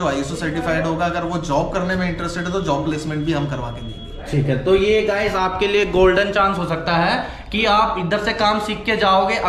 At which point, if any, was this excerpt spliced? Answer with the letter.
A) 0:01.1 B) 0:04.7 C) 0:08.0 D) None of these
D